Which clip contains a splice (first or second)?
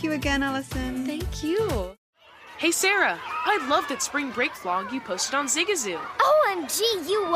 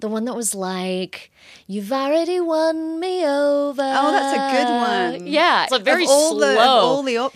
first